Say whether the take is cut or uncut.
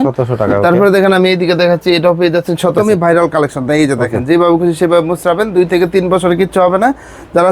cut